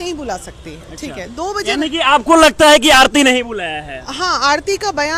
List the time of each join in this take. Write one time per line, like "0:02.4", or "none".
none